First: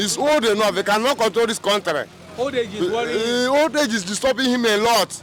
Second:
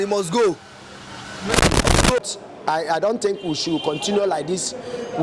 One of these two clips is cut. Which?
second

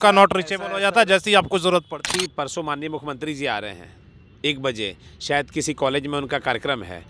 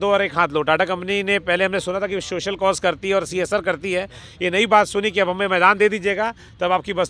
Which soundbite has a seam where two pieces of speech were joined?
first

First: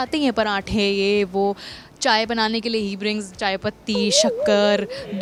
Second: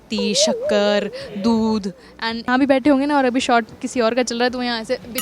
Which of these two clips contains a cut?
second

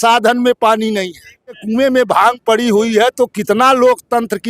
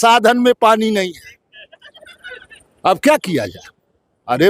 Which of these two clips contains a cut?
first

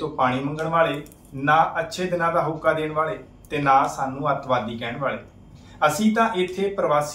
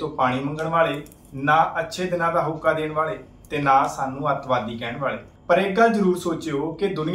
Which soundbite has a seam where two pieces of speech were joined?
second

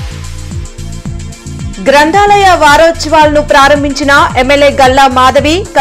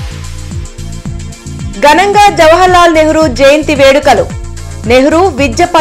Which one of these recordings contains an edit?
second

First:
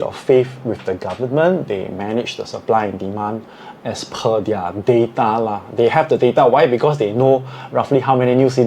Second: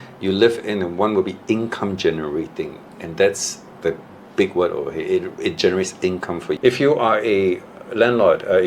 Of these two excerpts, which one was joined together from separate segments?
second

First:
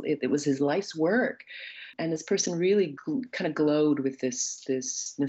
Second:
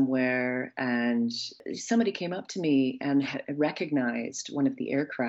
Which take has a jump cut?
second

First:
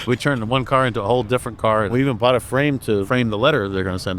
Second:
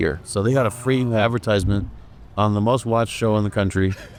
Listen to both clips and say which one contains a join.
first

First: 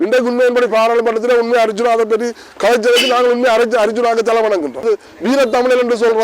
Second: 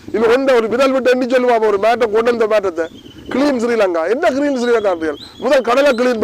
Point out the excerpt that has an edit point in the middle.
first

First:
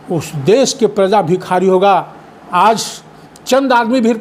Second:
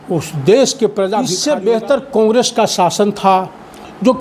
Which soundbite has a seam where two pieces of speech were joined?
second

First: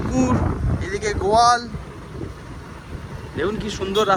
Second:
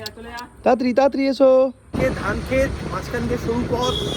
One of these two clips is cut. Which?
second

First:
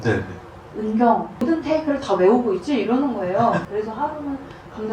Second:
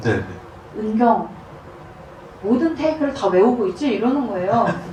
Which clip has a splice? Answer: first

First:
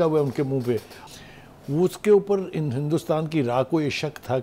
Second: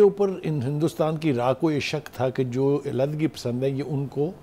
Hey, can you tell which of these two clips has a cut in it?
first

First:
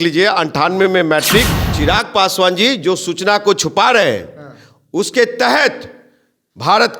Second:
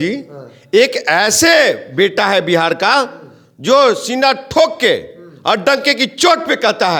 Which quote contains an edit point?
first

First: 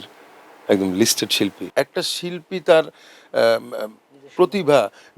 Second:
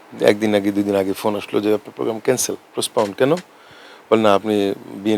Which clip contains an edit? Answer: first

